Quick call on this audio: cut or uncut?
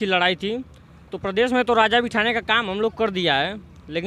uncut